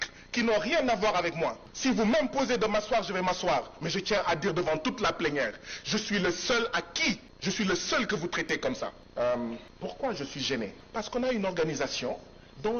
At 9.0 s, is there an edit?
yes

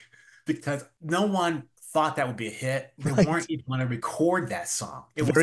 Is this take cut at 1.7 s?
yes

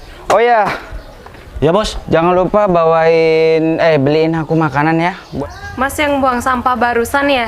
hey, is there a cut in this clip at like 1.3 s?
no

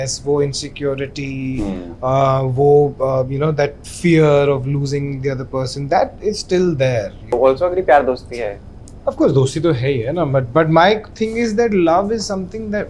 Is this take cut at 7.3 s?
yes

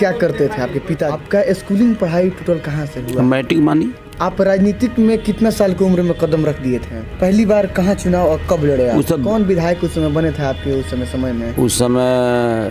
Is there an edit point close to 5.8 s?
no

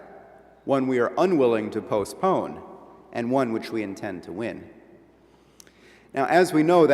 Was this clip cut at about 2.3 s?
yes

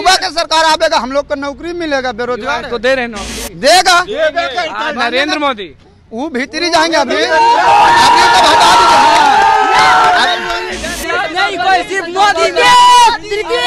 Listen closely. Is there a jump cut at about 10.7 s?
yes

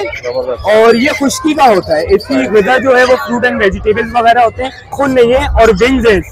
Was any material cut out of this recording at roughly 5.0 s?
yes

